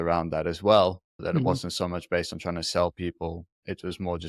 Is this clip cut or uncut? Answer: uncut